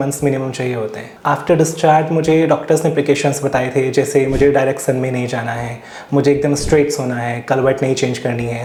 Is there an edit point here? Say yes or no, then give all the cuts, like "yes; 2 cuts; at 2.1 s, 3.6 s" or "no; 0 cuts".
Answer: no; 0 cuts